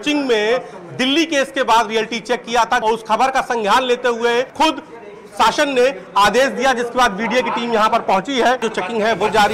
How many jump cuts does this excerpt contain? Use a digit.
3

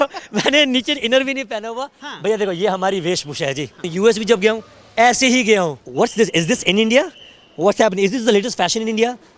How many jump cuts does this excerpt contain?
2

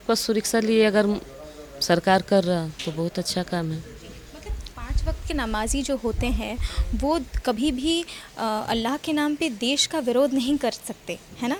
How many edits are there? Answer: 0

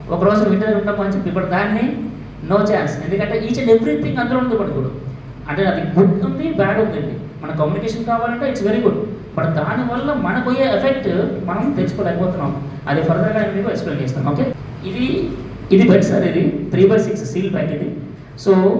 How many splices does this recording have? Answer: 1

